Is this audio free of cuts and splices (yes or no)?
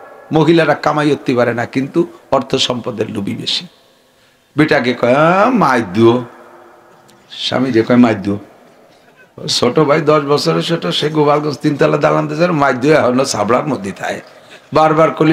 yes